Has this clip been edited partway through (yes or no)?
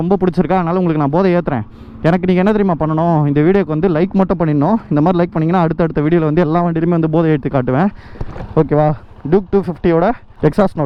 no